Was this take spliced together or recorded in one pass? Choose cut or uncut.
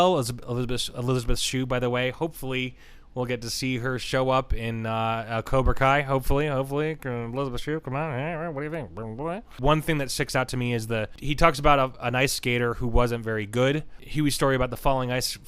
cut